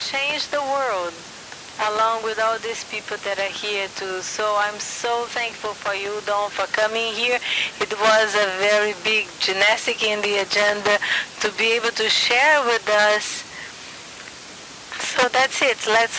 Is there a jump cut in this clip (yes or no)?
yes